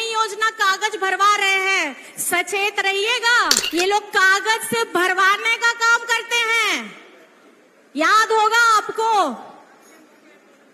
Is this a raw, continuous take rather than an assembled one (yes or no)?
no